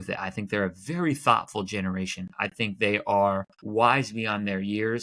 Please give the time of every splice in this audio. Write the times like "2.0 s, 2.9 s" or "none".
3.5 s